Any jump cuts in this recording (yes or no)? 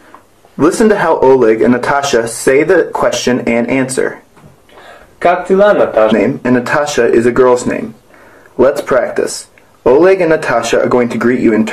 no